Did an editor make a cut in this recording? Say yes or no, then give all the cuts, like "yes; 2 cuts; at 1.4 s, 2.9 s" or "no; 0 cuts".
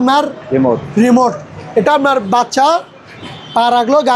no; 0 cuts